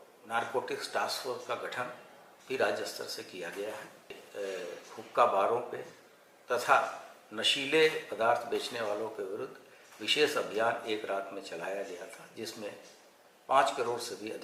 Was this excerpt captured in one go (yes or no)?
no